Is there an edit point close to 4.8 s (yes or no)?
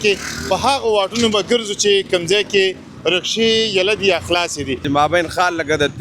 yes